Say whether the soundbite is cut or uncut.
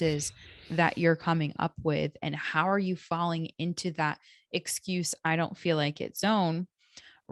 uncut